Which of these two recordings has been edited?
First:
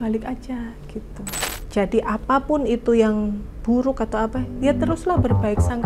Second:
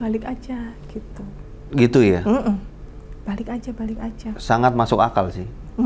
first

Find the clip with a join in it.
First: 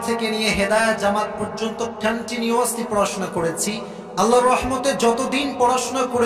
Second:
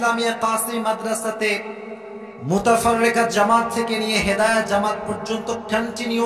first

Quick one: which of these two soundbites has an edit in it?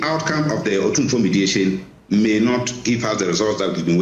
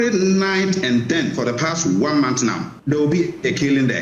second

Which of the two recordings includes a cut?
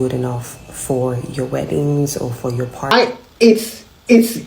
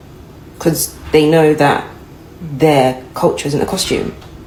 first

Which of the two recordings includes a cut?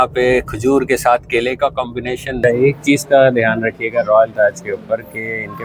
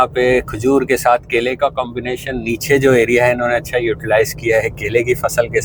first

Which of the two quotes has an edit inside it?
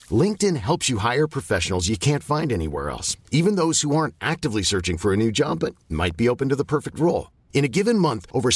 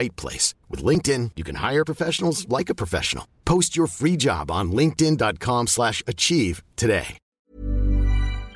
second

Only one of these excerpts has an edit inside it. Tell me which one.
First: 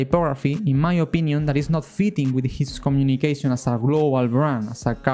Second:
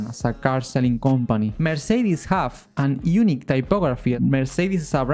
second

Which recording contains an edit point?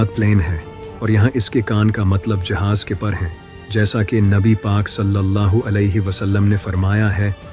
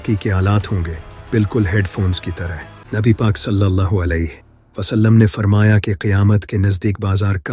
second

